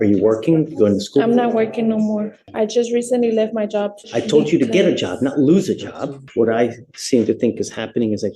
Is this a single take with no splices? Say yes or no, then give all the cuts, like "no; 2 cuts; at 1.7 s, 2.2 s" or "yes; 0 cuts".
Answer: no; 3 cuts; at 2.4 s, 4.0 s, 6.2 s